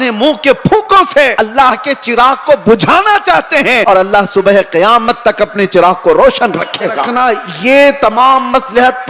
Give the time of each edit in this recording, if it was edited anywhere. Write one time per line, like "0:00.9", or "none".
0:01.3
0:03.8
0:07.1